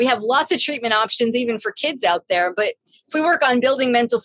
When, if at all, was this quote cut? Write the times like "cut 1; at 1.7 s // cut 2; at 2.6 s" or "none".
none